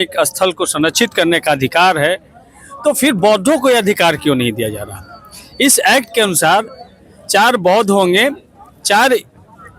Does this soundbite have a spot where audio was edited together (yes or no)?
no